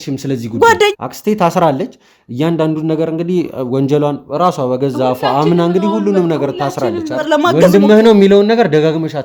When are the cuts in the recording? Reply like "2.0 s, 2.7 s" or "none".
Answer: 0.9 s, 7.2 s